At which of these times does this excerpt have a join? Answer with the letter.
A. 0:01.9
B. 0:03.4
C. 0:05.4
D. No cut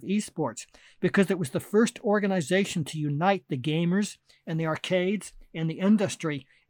D